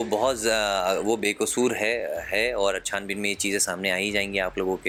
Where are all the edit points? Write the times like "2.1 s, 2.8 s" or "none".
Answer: none

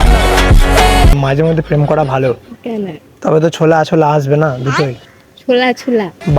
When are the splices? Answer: 1.2 s

